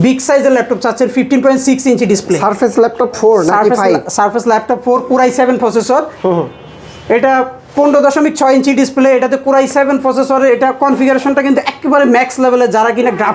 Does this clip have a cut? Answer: no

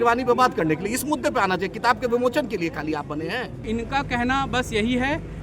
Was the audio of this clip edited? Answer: yes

